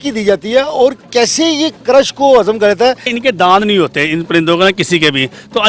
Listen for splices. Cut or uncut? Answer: cut